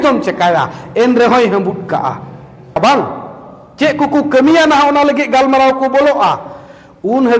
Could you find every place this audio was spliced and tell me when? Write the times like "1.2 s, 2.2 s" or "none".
2.8 s

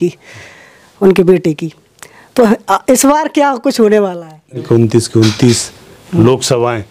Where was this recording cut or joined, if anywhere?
4.6 s

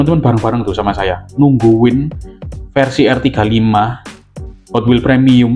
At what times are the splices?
none

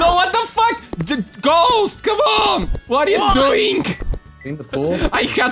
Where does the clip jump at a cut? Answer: none

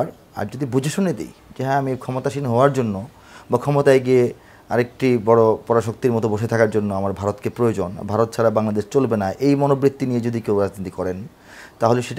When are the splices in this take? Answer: none

